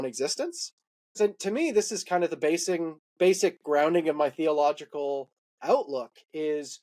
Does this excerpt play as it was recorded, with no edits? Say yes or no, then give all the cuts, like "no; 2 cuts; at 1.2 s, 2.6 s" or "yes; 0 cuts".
no; 1 cut; at 1.1 s